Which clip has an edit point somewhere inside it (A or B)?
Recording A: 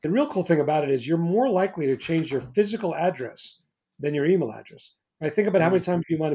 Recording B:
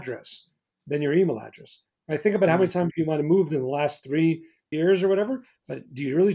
B